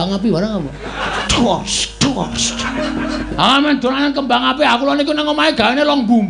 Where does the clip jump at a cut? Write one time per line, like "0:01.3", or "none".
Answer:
0:01.2
0:03.2